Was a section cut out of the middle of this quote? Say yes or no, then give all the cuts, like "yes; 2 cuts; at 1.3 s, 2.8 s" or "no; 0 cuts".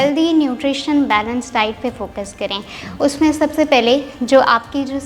no; 0 cuts